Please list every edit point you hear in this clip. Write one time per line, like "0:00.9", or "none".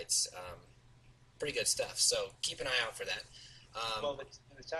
0:03.2